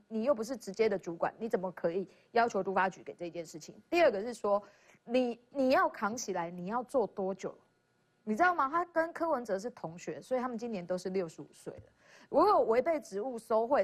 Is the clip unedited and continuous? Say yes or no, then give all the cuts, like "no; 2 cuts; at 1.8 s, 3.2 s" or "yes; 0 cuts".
yes; 0 cuts